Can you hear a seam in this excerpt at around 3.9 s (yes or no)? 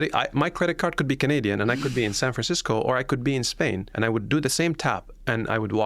yes